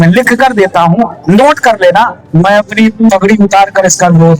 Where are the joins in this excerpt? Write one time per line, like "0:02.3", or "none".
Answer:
0:02.2